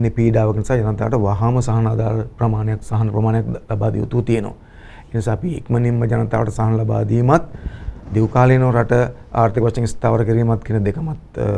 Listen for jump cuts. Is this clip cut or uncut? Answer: uncut